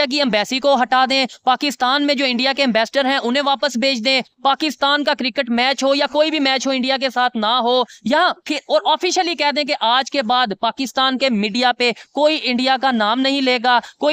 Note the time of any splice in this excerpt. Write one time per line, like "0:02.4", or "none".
none